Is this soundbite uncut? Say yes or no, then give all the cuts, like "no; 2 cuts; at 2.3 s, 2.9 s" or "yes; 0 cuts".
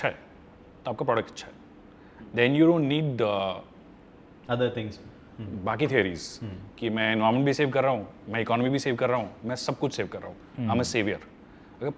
yes; 0 cuts